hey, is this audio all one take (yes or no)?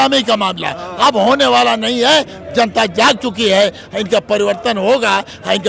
yes